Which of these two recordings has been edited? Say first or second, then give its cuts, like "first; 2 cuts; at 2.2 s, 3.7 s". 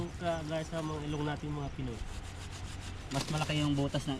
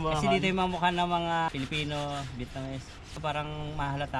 second; 2 cuts; at 1.5 s, 3.2 s